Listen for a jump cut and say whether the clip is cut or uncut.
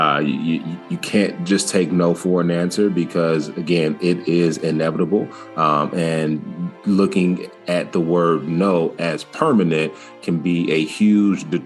uncut